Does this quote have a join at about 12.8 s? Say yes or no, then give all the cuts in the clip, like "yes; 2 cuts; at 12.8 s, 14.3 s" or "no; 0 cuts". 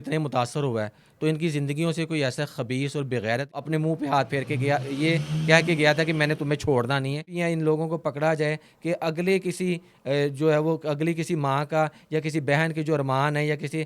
no; 2 cuts; at 3.6 s, 7.3 s